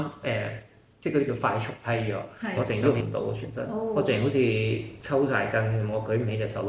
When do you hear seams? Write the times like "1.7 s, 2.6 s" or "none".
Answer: 2.6 s